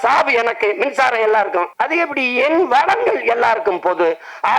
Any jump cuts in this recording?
yes; 1 cut; at 1.7 s

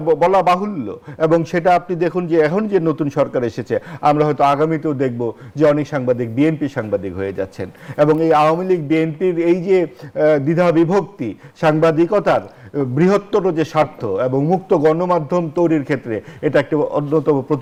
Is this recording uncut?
yes; 0 cuts

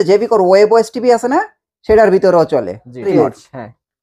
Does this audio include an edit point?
yes; 1 cut; at 3.1 s

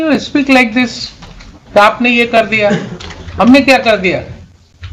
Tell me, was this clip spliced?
no; 0 cuts

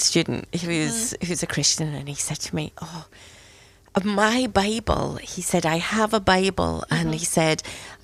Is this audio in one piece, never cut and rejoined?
yes; 0 cuts

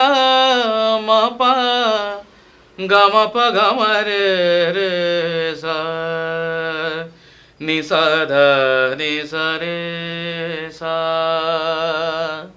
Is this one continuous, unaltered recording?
yes; 0 cuts

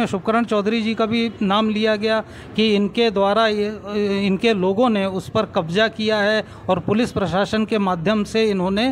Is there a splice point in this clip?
no; 0 cuts

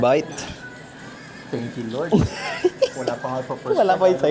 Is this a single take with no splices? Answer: yes; 0 cuts

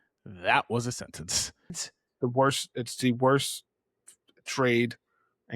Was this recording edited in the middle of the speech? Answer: yes; 1 cut; at 1.8 s

